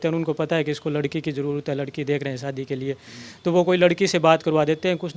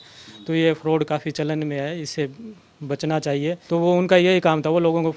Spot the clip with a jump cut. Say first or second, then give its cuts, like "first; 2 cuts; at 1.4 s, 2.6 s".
second; 1 cut; at 3.6 s